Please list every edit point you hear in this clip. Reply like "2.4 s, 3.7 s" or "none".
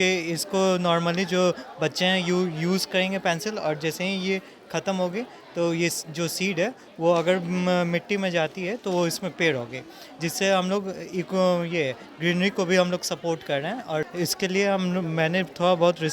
14.1 s